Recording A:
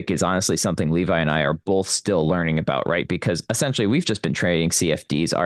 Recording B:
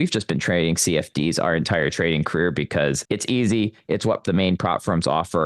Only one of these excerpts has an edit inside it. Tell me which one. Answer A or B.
B